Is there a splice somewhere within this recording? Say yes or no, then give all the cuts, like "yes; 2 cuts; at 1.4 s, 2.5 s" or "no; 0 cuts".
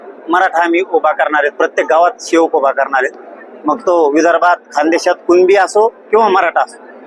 no; 0 cuts